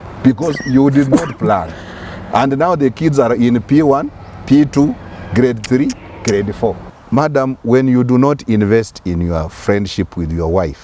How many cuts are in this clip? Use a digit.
1